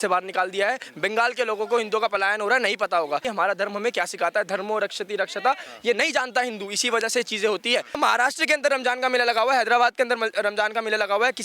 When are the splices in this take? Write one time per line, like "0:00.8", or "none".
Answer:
0:03.3
0:08.0

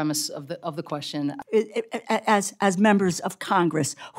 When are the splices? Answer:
0:01.4

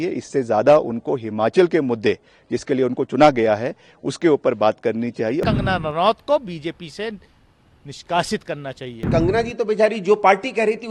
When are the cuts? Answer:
0:05.4
0:09.1

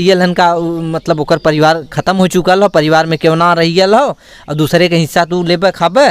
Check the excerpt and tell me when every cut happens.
none

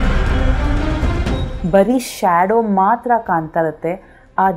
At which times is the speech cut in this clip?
0:01.4

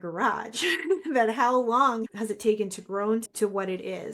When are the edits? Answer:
0:02.1
0:03.3

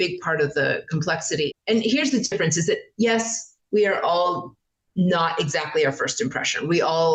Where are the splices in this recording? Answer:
0:01.5

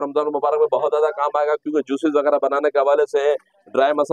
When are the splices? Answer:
none

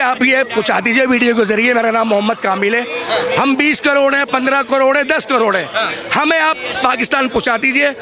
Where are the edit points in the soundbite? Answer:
none

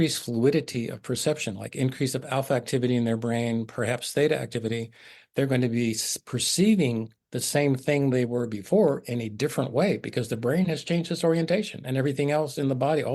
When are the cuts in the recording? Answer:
none

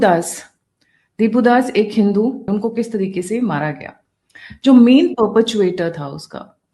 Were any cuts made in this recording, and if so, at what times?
0:02.5

